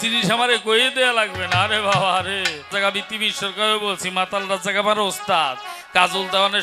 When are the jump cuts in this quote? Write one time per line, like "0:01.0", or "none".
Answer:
0:02.7